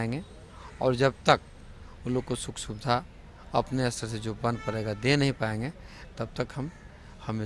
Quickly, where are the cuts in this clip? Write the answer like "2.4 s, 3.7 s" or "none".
none